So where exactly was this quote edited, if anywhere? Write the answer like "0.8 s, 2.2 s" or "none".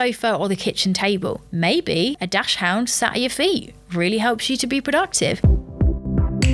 1.4 s, 5.7 s